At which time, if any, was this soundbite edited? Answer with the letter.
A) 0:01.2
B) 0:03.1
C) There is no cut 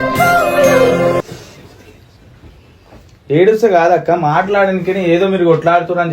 A